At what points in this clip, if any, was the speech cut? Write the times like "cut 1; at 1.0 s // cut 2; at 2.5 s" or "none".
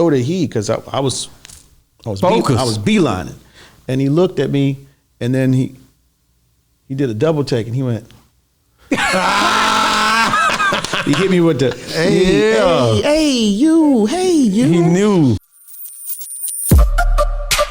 cut 1; at 15.4 s